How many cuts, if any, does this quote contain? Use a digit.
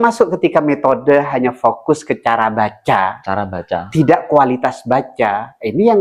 0